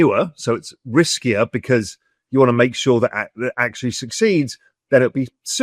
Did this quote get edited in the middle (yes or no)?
no